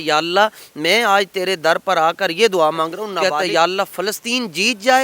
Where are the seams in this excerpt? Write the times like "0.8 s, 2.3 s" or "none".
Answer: 3.2 s